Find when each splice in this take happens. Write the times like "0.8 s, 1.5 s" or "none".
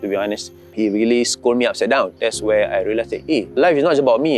0.7 s, 2.1 s